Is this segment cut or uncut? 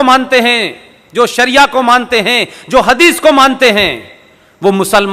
uncut